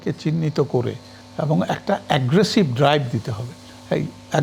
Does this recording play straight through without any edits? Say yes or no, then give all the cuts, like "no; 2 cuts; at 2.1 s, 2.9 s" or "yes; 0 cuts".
yes; 0 cuts